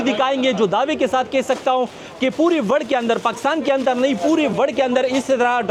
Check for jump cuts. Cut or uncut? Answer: uncut